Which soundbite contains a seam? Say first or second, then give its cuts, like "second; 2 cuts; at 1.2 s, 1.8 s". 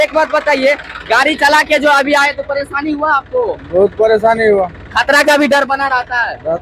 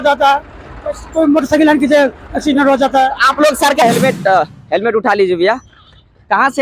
second; 1 cut; at 3.8 s